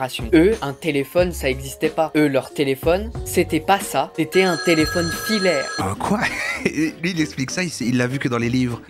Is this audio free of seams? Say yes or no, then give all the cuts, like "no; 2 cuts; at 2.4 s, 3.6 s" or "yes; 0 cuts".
no; 2 cuts; at 3.2 s, 5.7 s